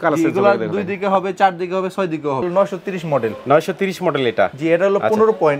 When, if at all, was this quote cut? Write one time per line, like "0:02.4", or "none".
0:02.5